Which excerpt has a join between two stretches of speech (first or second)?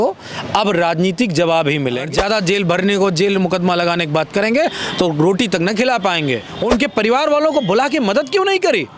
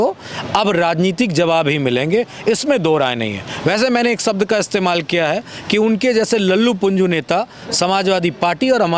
first